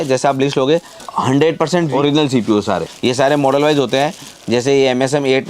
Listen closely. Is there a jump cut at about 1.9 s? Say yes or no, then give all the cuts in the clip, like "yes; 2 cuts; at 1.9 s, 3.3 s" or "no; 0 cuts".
yes; 3 cuts; at 1.0 s, 1.9 s, 2.9 s